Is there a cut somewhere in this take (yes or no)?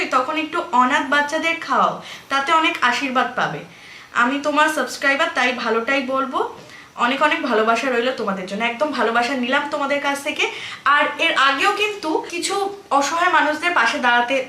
no